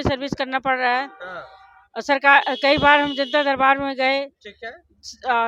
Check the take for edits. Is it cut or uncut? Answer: uncut